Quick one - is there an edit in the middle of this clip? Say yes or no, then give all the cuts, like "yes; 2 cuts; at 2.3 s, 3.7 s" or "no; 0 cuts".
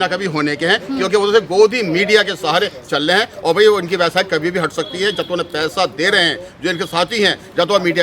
no; 0 cuts